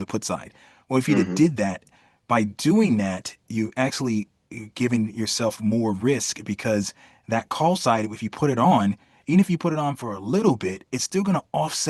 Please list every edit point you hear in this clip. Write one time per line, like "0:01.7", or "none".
none

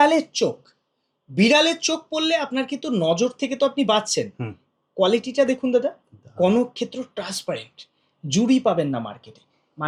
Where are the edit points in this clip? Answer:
none

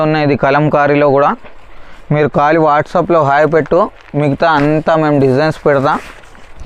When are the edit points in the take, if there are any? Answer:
none

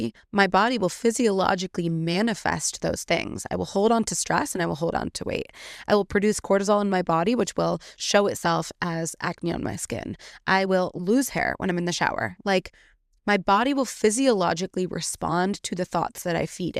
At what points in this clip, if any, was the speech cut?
none

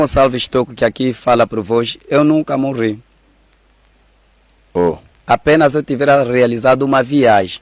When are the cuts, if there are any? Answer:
none

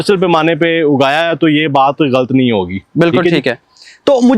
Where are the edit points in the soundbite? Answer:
none

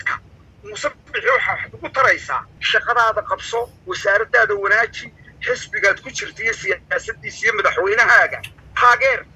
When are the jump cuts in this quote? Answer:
0:02.5

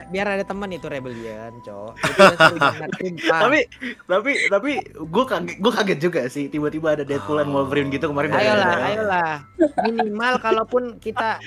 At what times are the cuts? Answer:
none

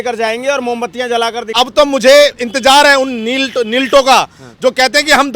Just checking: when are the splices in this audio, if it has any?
0:01.5

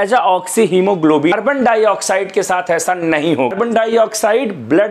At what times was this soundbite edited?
0:01.3
0:03.5

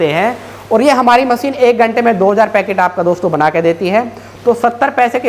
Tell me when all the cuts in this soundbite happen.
none

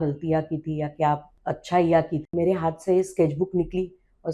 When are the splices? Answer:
0:01.3
0:02.3

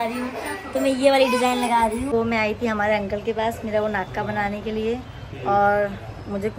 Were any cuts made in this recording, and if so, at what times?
0:02.1

